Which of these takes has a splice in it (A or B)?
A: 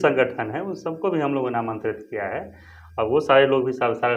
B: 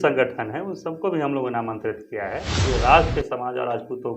B